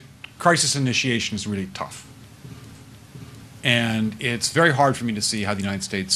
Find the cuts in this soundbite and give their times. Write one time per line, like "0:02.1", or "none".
0:02.4